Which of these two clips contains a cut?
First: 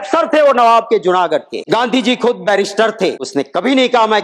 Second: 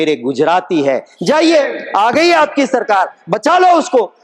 first; 2 cuts; at 1.5 s, 3.3 s

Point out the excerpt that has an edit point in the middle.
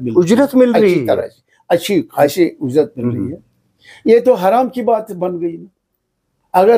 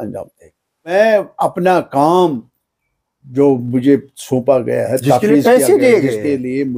second; 1 cut; at 0.9 s

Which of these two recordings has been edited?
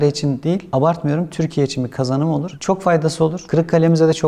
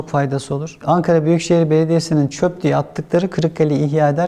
first; 1 cut; at 2.5 s

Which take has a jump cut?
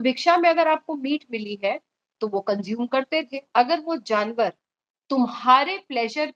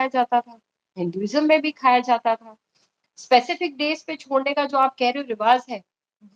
first; 1 cut; at 3.4 s

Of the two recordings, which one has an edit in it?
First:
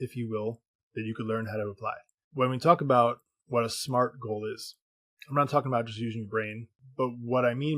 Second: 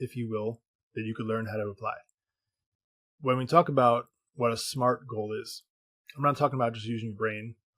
first; 2 cuts; at 2.1 s, 6.8 s

